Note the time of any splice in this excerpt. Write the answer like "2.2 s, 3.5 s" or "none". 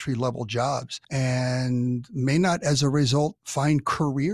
1.0 s, 3.4 s